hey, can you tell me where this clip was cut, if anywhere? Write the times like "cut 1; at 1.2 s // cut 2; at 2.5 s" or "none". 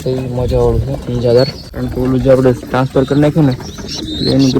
cut 1; at 1.6 s